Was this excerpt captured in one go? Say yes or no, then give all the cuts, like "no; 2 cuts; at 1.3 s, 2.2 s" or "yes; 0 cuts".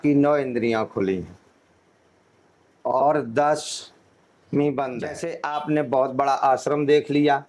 no; 1 cut; at 5.3 s